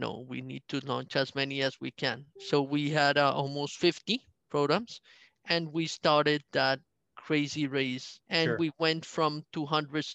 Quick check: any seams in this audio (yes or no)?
yes